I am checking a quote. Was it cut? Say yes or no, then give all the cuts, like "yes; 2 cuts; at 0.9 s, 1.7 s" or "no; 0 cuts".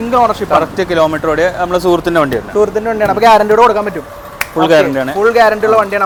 no; 0 cuts